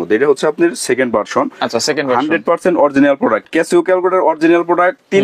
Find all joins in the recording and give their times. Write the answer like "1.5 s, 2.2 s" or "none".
3.4 s